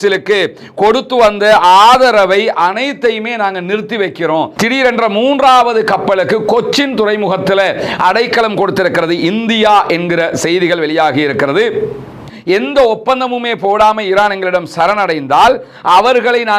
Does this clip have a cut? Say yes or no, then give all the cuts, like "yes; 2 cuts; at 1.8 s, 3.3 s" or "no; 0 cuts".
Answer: yes; 2 cuts; at 4.5 s, 12.2 s